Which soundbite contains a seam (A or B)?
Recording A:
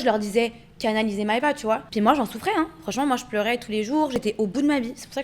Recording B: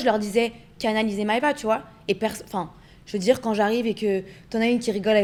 A